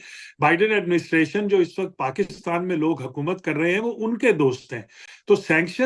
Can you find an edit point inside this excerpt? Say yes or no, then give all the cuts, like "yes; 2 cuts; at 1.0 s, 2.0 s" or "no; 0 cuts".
no; 0 cuts